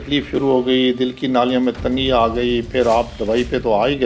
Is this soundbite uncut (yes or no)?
yes